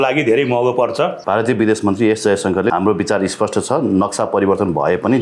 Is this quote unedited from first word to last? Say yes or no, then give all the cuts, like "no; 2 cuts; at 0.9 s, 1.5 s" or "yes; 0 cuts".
no; 2 cuts; at 1.2 s, 2.7 s